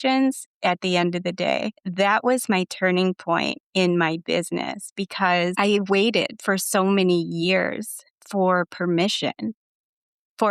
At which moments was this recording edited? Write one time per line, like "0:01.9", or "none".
0:01.7
0:05.6